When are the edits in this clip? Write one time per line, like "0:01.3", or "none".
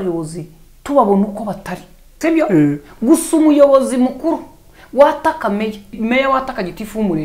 0:02.0
0:05.9